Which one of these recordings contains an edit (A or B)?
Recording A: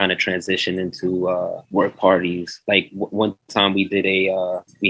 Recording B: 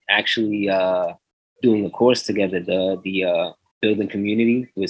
A